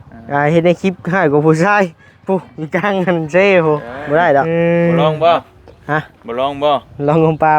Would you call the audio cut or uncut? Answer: cut